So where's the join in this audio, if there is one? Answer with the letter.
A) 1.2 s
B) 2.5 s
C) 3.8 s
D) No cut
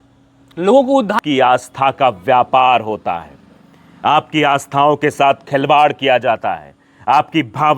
A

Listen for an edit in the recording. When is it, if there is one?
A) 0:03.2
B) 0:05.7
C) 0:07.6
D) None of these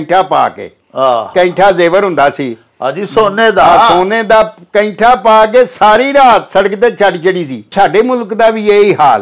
C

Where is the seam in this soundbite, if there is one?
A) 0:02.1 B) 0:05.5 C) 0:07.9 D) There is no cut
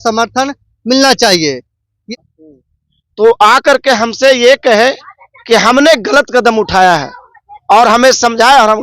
A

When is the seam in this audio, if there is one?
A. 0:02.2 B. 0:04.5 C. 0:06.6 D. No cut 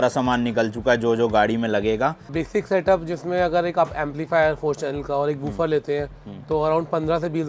A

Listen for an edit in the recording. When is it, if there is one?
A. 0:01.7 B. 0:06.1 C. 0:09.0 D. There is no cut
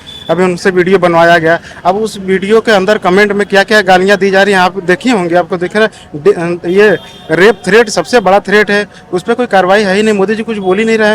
D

